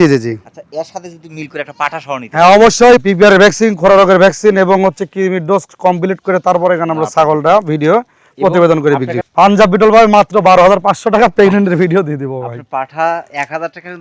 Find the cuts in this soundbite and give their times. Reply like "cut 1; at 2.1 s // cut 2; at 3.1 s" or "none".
cut 1; at 3.0 s // cut 2; at 9.2 s